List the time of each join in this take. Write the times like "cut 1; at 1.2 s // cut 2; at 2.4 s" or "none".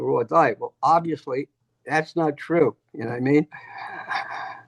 none

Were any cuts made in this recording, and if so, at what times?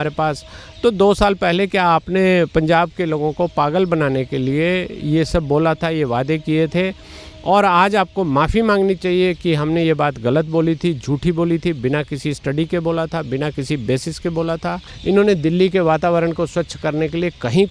cut 1; at 14.9 s

